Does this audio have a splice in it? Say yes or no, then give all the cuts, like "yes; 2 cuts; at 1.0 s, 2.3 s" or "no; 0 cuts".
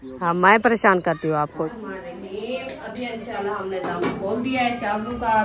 yes; 1 cut; at 1.7 s